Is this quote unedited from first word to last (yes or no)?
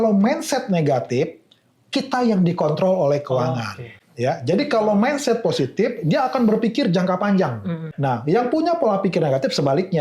no